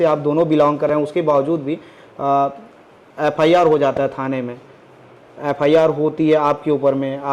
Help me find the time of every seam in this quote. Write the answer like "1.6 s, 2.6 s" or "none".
none